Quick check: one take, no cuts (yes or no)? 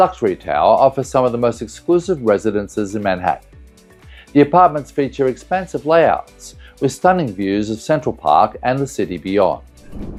yes